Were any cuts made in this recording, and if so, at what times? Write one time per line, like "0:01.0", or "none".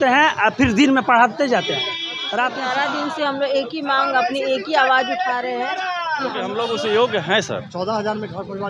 0:02.5
0:06.5